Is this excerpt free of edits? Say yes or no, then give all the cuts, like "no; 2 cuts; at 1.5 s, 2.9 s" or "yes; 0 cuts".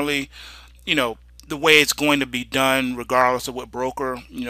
no; 1 cut; at 3.0 s